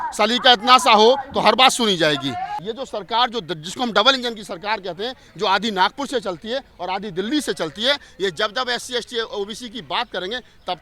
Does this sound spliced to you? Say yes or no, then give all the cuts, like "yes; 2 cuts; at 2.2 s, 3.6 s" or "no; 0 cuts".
yes; 1 cut; at 2.6 s